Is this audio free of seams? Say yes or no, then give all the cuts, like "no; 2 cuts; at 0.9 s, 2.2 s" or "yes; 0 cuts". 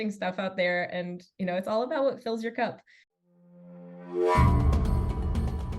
no; 1 cut; at 2.9 s